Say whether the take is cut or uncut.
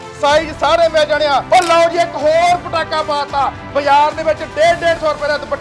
cut